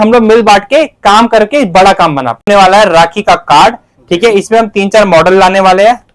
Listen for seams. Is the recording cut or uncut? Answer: cut